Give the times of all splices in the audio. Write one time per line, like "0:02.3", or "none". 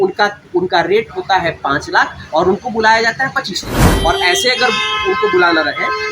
0:03.9